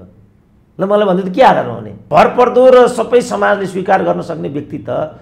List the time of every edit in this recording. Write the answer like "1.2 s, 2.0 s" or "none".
2.0 s